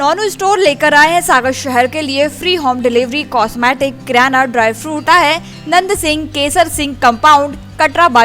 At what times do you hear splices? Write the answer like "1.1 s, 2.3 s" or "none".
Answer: 5.0 s